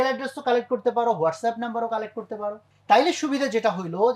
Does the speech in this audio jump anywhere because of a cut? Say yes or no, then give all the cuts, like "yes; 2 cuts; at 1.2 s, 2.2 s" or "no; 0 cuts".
yes; 1 cut; at 2.7 s